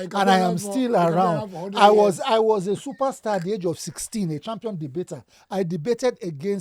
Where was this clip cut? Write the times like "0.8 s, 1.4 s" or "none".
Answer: none